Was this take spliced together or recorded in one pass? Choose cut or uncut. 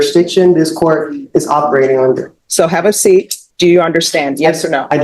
cut